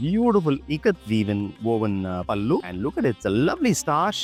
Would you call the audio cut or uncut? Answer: uncut